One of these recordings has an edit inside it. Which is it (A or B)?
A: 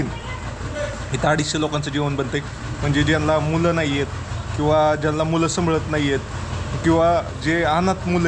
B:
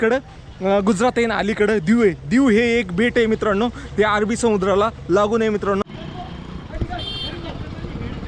B